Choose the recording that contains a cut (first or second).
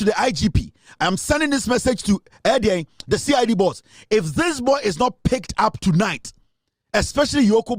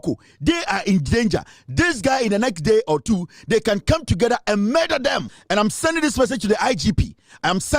second